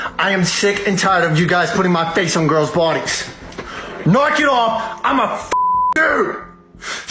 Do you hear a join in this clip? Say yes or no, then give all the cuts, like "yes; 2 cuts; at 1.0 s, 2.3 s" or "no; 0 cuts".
no; 0 cuts